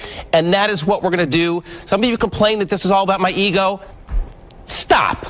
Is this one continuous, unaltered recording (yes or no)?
no